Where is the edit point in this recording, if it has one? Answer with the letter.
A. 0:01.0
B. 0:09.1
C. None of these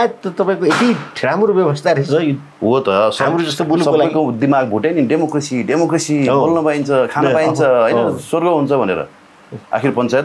C